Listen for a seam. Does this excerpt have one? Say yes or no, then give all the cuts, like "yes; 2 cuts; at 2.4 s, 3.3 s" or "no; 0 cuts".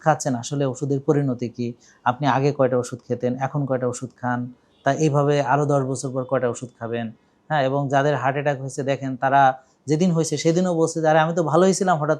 no; 0 cuts